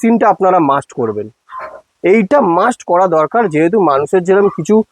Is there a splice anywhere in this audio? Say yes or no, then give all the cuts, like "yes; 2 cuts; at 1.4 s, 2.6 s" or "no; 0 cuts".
no; 0 cuts